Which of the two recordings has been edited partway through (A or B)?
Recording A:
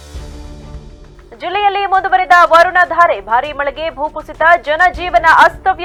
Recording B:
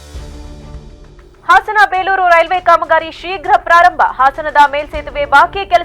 B